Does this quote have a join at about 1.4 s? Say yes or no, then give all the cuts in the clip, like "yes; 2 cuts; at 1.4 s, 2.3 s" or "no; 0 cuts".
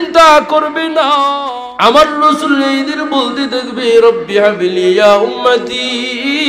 yes; 1 cut; at 1.4 s